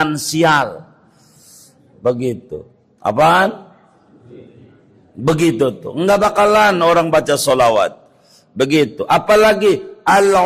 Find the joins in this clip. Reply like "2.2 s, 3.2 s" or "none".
none